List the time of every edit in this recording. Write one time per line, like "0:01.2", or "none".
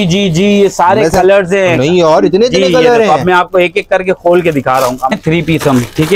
0:05.1